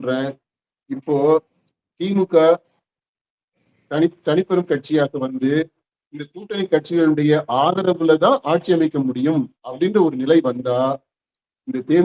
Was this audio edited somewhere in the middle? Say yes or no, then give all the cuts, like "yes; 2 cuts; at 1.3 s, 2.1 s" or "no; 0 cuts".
no; 0 cuts